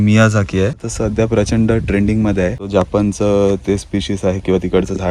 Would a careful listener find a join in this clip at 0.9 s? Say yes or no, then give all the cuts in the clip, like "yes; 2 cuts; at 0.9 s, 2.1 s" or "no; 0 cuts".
yes; 2 cuts; at 0.9 s, 2.7 s